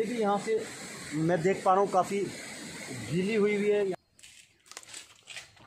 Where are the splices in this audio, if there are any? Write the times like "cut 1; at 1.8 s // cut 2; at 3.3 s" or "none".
cut 1; at 3.9 s